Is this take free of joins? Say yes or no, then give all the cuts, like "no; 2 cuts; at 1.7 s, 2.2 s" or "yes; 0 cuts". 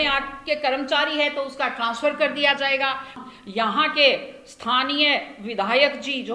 no; 1 cut; at 3.2 s